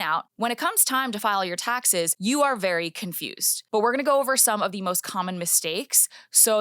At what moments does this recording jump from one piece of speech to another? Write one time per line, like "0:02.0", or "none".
0:02.1
0:03.5